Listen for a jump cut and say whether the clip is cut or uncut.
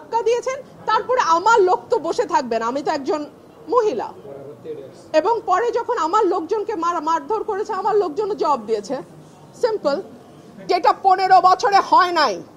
cut